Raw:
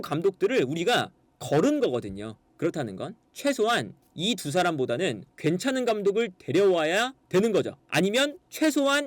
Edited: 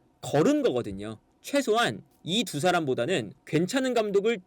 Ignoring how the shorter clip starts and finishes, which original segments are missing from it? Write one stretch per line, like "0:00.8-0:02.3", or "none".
0:02.4-0:03.2

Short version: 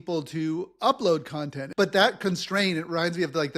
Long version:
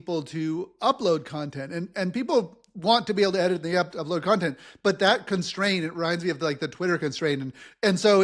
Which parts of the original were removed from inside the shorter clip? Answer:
0:01.6-0:04.7

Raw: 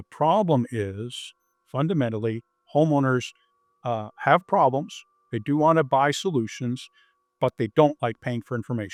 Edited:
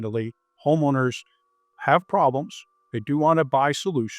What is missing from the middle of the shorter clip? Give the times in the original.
0:03.8-0:04.1

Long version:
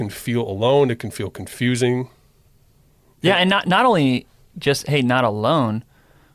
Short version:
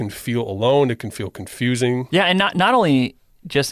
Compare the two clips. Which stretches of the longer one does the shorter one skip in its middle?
0:02.1-0:03.2

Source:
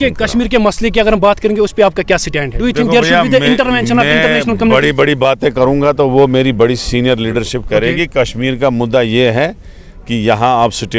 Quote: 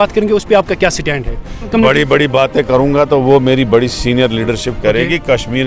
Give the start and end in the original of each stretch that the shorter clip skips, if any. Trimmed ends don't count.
0:02.7-0:04.3

